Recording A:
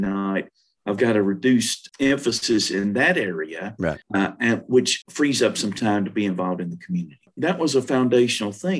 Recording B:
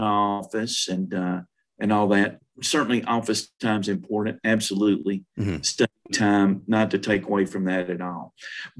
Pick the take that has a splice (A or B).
A